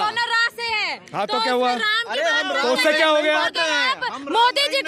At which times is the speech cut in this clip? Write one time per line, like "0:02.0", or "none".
none